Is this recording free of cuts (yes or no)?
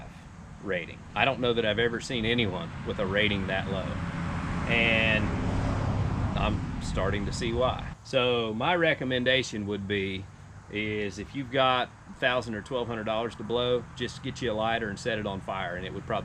no